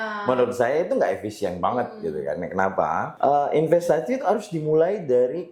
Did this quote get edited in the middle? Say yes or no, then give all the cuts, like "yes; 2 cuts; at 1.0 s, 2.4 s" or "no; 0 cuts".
yes; 1 cut; at 3.1 s